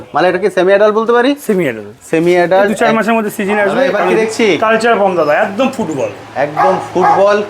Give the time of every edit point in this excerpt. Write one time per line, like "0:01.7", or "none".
0:04.0

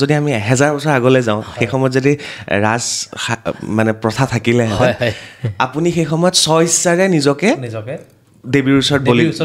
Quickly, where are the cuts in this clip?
none

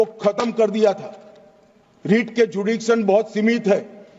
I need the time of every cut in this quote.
none

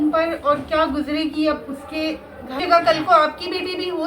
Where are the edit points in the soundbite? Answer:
0:02.6

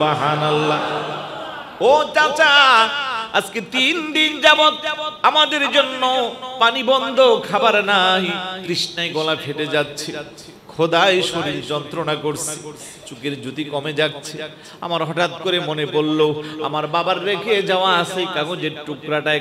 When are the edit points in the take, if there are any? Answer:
0:08.5

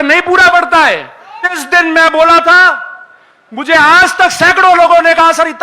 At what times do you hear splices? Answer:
0:01.6

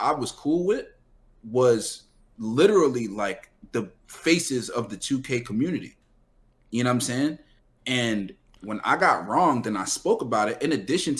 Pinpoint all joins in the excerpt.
none

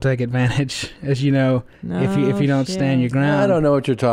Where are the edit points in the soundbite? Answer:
none

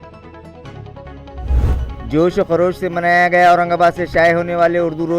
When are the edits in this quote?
0:01.9

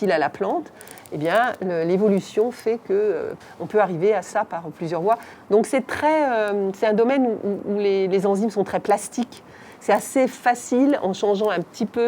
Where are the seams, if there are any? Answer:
0:03.3
0:05.3

